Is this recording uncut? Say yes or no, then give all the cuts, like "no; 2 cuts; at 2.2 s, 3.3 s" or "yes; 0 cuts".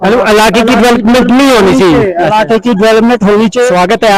yes; 0 cuts